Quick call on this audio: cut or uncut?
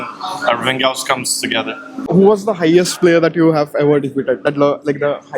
cut